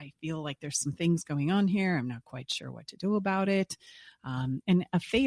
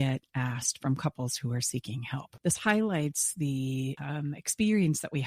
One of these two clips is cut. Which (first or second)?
second